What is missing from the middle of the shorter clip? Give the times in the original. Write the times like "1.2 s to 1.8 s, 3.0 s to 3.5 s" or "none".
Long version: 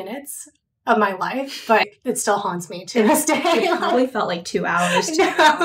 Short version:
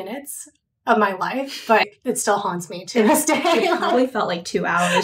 none